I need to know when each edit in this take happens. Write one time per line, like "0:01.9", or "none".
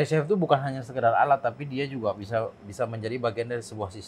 none